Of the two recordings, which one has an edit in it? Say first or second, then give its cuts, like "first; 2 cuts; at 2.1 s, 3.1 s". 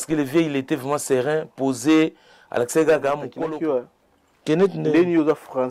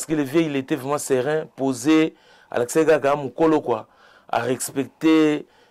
first; 1 cut; at 3.3 s